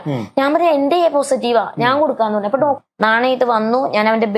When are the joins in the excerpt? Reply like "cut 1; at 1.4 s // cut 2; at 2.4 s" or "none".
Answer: cut 1; at 2.8 s